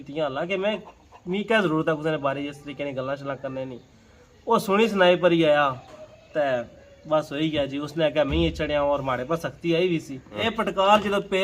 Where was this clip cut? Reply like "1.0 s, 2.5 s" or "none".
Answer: 10.5 s